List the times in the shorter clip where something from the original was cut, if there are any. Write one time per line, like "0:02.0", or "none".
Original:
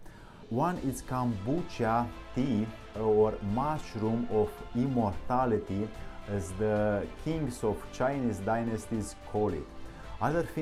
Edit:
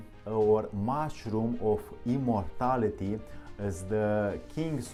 none